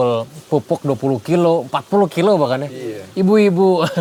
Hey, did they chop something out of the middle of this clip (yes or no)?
no